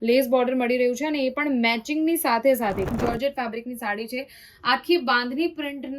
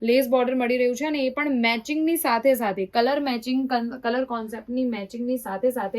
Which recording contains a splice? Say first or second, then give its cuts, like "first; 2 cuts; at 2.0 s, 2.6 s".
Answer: first; 1 cut; at 2.9 s